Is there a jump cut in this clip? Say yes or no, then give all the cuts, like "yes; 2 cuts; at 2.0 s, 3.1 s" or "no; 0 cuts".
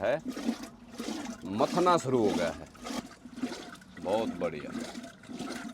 yes; 1 cut; at 3.0 s